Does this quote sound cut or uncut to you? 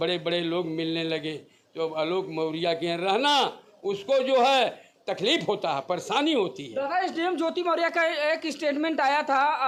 uncut